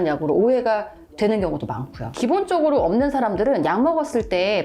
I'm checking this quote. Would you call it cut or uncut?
cut